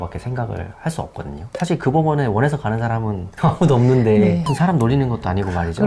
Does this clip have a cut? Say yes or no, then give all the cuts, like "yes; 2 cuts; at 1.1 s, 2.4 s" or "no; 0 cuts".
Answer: yes; 2 cuts; at 1.5 s, 4.5 s